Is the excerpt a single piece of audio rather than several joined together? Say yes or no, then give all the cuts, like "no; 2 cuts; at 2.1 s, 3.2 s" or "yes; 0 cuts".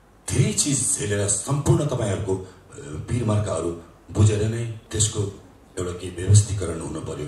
no; 1 cut; at 4.8 s